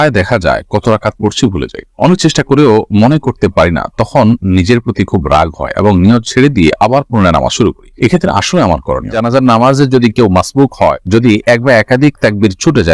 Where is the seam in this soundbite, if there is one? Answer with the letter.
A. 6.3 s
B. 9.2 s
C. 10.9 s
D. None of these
B